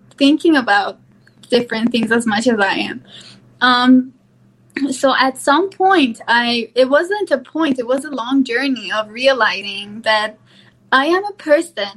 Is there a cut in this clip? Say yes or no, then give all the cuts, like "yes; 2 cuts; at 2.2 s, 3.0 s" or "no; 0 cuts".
no; 0 cuts